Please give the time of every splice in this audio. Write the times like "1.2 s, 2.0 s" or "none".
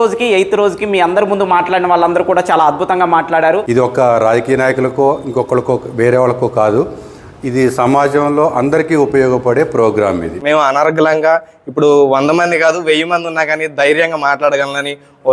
3.6 s, 10.3 s